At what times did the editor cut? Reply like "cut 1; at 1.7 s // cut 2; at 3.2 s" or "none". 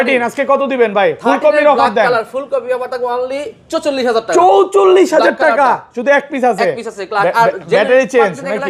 none